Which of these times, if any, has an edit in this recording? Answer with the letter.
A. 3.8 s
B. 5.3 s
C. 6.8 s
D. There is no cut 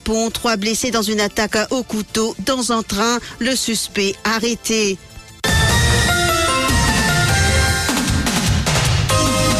B